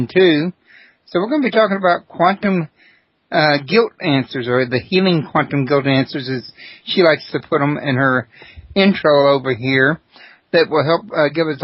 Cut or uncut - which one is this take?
cut